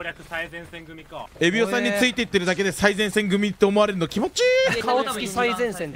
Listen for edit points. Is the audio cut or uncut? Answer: cut